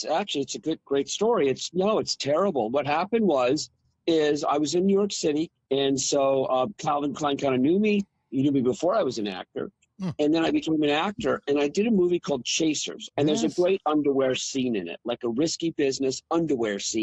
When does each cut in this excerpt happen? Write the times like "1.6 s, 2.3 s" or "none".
5.6 s, 12.9 s